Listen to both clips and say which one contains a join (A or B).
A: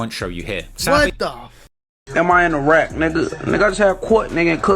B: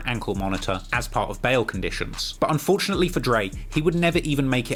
A